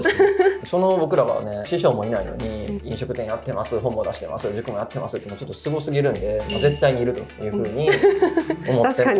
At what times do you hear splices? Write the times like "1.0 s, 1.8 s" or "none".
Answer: none